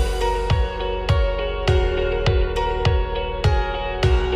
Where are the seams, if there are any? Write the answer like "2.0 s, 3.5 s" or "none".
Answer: none